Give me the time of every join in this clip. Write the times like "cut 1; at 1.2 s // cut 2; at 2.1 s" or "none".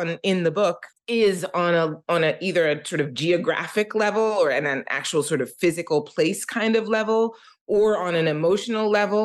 cut 1; at 0.9 s